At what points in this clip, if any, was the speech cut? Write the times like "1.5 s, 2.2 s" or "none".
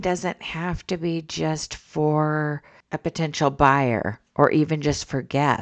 none